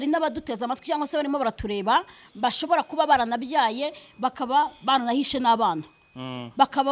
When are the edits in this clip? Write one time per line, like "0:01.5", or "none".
none